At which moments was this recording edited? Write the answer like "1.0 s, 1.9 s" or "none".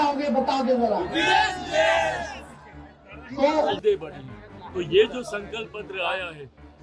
3.8 s